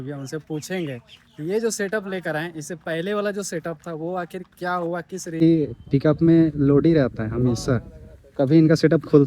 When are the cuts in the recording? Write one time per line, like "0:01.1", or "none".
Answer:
0:05.4